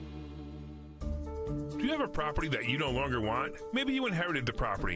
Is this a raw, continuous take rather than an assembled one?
no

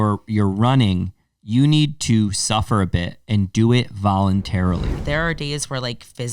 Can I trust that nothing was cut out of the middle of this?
no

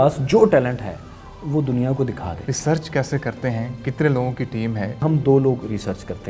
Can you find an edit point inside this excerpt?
yes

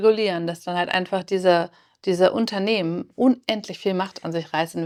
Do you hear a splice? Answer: no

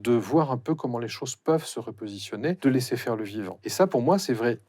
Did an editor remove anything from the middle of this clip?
yes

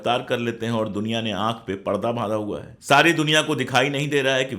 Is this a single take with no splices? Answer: no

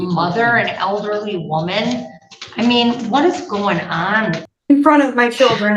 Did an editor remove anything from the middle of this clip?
yes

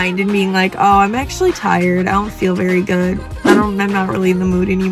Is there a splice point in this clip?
no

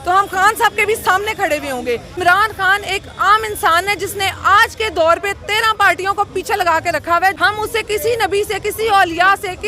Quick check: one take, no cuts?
no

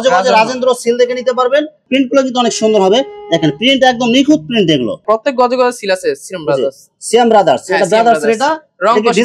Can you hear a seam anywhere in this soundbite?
yes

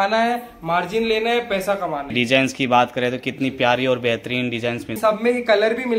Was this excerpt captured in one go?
no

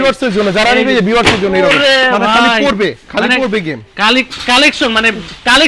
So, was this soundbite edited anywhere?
no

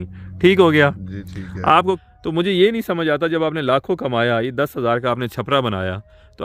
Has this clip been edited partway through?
yes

